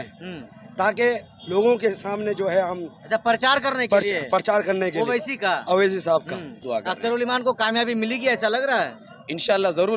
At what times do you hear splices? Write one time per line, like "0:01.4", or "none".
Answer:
0:06.5